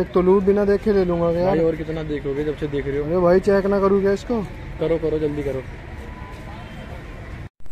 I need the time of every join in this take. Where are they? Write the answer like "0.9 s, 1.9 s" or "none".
none